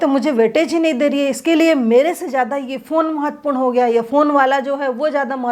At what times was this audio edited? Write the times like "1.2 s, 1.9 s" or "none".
none

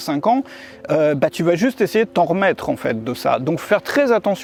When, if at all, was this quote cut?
none

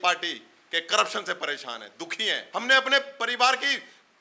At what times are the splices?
2.4 s

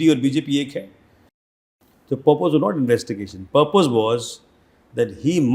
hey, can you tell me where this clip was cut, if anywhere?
1.2 s

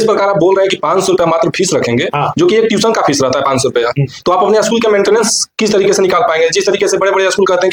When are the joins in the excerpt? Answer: none

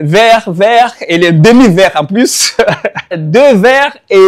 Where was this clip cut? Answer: 3.2 s

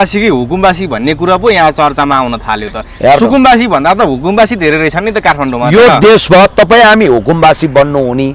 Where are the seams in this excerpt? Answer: none

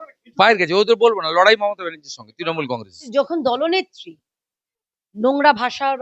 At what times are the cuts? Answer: 3.1 s

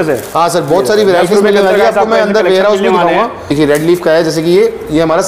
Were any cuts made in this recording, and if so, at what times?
3.5 s

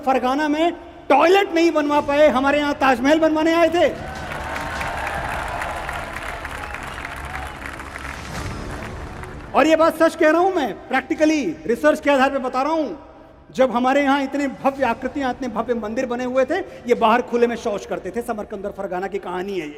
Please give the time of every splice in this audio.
none

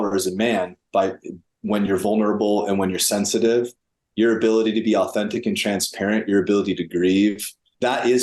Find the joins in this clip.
none

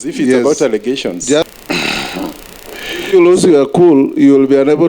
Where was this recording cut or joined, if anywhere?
1.4 s

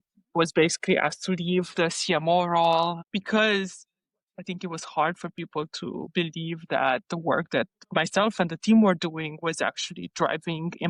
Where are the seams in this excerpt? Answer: 3.0 s, 7.9 s

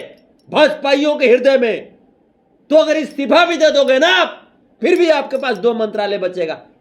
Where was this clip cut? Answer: none

